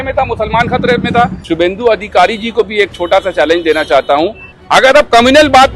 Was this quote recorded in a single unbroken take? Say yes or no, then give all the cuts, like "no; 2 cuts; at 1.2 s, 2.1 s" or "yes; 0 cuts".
no; 2 cuts; at 1.4 s, 4.6 s